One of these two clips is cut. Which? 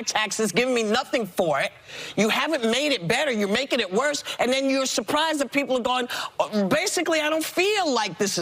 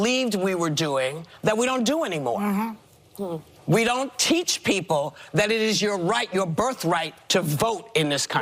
first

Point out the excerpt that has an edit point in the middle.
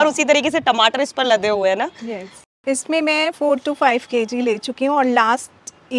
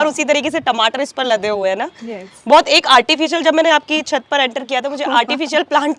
first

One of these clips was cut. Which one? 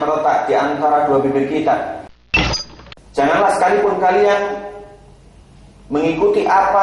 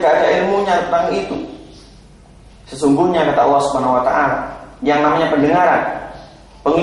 first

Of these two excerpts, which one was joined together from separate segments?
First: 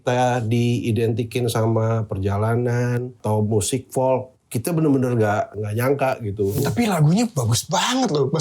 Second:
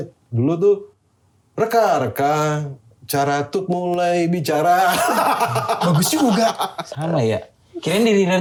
first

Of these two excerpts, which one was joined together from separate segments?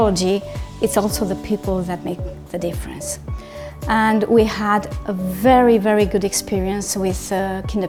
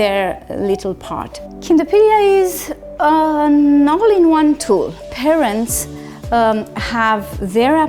second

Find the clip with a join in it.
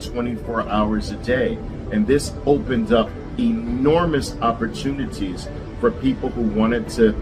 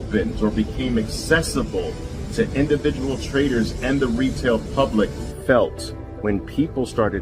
second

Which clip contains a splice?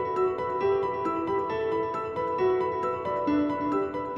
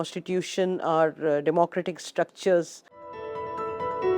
second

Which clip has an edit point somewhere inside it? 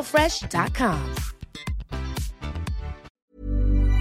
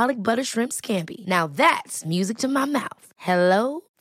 first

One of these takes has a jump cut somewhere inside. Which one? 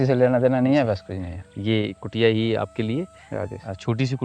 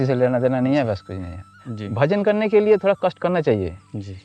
second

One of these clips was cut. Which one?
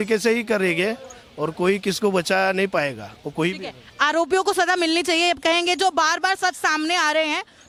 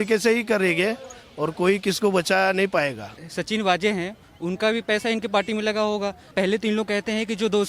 second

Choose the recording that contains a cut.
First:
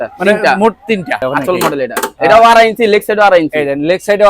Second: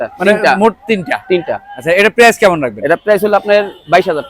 first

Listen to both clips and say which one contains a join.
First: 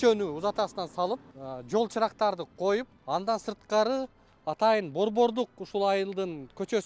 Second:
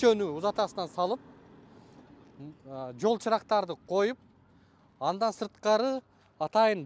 first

